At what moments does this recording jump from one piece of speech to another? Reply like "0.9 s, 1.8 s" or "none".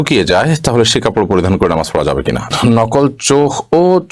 2.5 s